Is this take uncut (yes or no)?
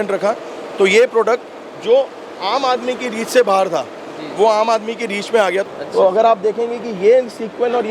no